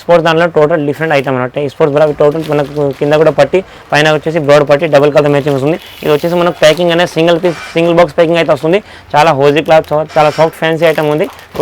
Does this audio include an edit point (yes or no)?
no